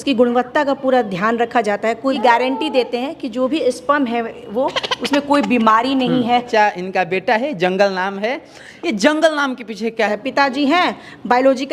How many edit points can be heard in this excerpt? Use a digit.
3